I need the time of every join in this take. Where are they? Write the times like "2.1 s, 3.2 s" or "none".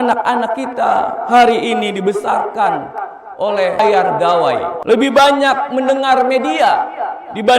3.8 s, 4.7 s